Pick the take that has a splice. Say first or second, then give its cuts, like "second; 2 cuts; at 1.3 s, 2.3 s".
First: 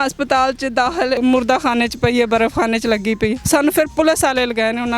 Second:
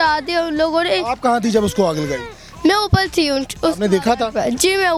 first; 2 cuts; at 1.2 s, 3.4 s